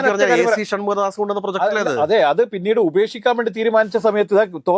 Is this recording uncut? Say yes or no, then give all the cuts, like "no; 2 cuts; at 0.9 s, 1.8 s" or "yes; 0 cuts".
yes; 0 cuts